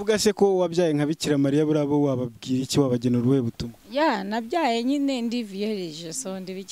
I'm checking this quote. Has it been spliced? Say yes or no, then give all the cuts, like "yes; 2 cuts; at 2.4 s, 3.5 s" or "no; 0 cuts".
no; 0 cuts